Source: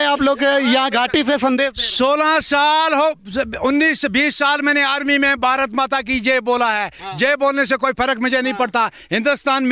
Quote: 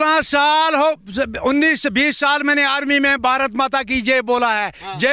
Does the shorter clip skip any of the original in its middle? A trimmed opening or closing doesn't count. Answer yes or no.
no